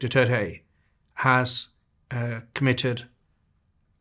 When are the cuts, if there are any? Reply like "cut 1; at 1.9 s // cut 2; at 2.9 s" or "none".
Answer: none